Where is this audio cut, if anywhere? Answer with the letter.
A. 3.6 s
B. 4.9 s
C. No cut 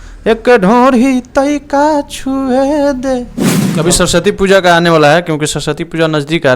A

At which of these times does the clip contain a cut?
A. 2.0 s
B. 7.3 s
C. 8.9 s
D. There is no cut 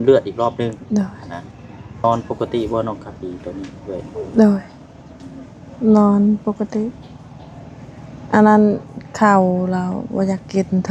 A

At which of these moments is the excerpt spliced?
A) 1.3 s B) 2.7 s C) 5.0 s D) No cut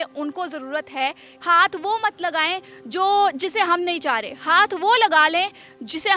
A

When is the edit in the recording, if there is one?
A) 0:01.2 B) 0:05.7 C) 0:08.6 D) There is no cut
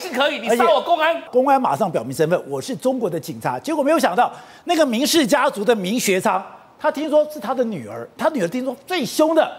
A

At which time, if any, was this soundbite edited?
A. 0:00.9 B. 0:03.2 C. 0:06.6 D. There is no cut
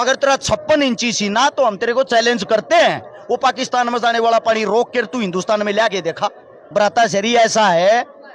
C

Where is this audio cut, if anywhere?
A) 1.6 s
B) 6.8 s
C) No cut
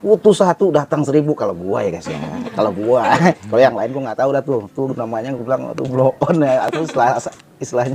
C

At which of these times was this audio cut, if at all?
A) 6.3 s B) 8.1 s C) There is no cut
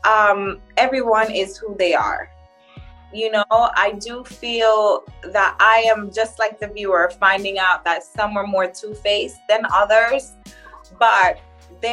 C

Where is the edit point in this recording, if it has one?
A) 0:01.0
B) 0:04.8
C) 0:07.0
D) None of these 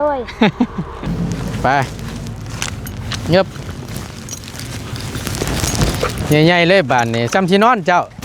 A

